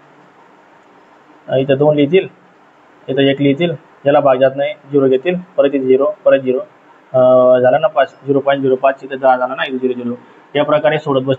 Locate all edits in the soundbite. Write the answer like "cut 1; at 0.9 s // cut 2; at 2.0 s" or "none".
none

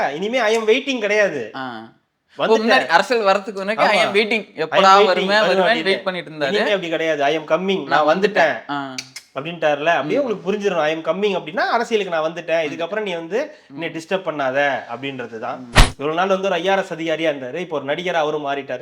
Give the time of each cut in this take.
cut 1; at 15.8 s

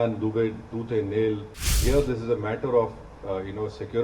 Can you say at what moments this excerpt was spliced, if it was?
cut 1; at 1.8 s

